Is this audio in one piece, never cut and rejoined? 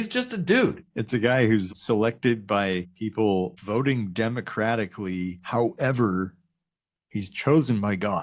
no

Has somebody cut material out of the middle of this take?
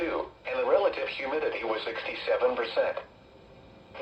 no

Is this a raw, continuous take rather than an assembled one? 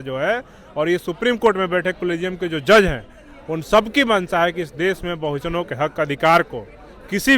yes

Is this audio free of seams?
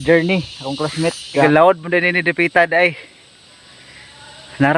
no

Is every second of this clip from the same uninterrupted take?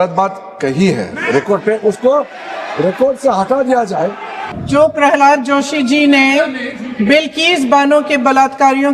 no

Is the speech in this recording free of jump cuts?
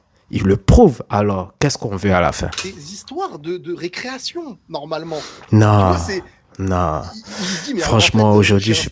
yes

